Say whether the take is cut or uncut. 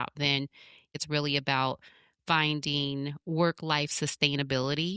cut